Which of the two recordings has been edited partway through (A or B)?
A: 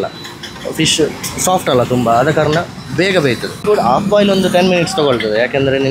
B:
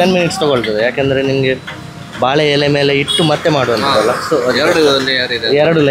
A